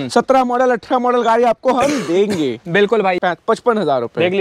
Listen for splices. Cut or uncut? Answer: cut